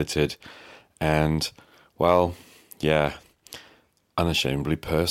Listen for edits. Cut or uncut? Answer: uncut